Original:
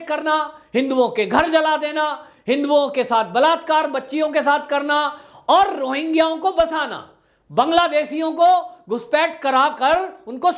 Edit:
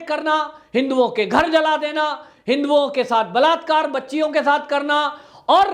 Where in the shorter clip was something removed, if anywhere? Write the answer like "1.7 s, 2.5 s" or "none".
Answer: none